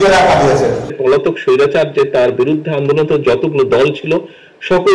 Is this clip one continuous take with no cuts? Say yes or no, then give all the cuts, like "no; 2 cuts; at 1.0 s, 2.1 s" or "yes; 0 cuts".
no; 1 cut; at 1.0 s